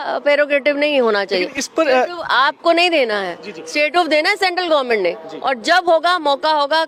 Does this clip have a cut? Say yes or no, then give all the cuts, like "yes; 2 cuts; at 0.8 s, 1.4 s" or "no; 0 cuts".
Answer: no; 0 cuts